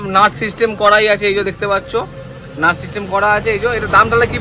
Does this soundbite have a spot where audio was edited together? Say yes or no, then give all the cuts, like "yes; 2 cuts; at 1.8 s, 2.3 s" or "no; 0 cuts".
no; 0 cuts